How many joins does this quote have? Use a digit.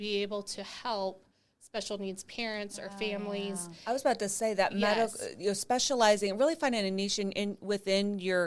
0